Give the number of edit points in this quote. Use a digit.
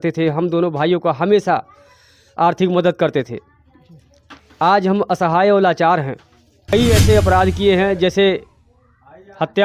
1